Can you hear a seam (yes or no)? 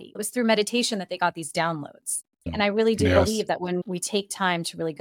yes